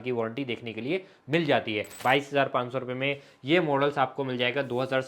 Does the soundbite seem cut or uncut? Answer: cut